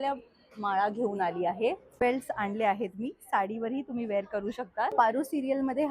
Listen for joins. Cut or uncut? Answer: cut